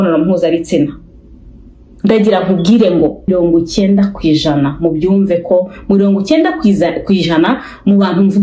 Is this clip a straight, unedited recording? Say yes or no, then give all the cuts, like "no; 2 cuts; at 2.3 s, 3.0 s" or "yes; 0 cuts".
no; 1 cut; at 3.3 s